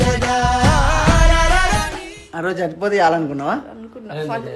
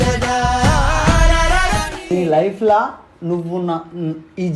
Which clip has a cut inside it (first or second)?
second